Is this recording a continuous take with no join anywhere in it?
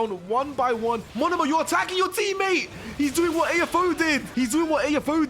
no; 2 cuts; at 1.1 s, 4.3 s

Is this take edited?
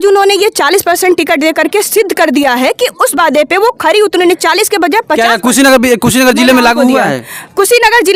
no; 0 cuts

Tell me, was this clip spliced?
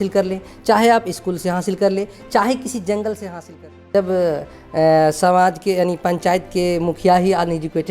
yes; 1 cut; at 3.9 s

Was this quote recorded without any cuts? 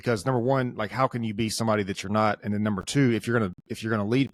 yes; 0 cuts

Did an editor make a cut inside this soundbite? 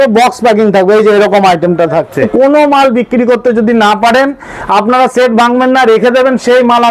yes; 1 cut; at 2.3 s

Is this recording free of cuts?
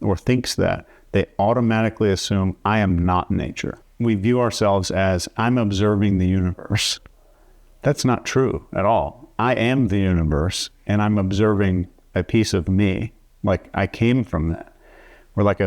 no; 1 cut; at 3.7 s

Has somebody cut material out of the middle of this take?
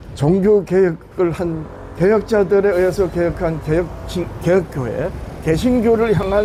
no; 0 cuts

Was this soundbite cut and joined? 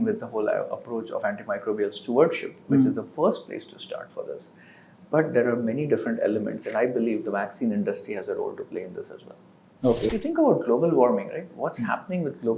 yes; 1 cut; at 10.1 s

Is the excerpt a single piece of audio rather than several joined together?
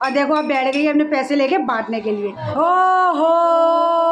no; 1 cut; at 2.5 s

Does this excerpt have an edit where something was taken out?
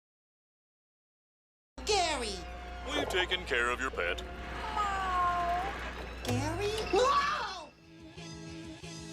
yes; 1 cut; at 7.9 s

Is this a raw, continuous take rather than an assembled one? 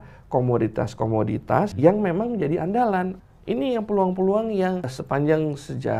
no; 3 cuts; at 1.7 s, 3.2 s, 5.0 s

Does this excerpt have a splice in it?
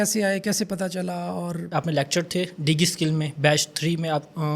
no; 0 cuts

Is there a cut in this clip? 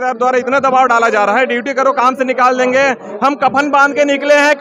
no; 0 cuts

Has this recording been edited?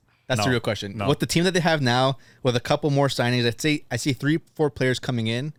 no; 0 cuts

